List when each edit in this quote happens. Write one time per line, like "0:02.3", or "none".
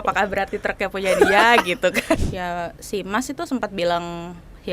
0:02.2